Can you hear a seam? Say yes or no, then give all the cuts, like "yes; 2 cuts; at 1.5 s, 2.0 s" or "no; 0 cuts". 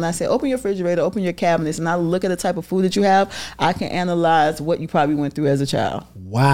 no; 0 cuts